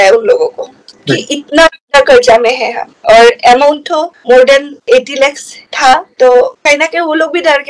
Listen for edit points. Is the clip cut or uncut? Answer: uncut